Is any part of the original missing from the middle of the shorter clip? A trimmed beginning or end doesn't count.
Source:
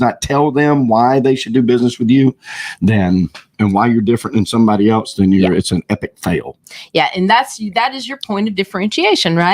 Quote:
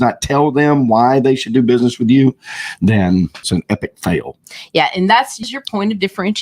yes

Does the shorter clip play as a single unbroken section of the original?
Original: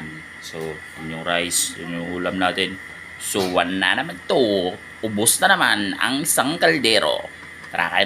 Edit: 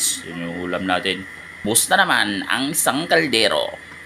no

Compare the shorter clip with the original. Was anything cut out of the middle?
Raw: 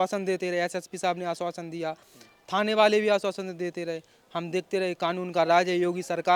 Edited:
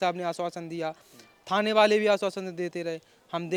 no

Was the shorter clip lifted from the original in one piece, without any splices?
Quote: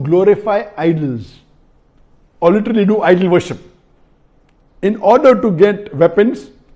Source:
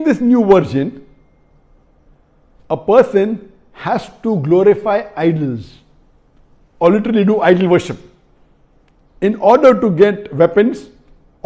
yes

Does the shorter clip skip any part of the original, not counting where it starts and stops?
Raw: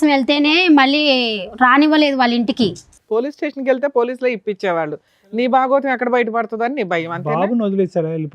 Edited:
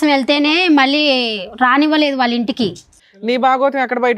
yes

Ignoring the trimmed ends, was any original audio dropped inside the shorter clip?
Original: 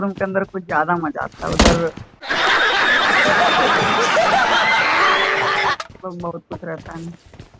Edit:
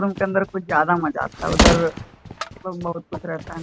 yes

